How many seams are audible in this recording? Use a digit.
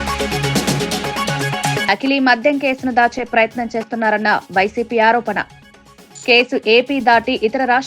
2